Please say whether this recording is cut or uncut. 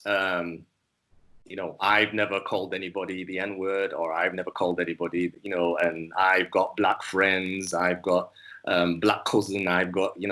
uncut